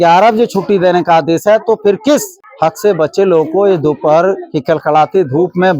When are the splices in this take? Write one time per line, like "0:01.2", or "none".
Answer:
0:02.4